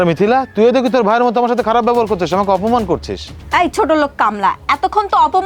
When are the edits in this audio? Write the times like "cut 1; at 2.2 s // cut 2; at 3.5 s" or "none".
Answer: none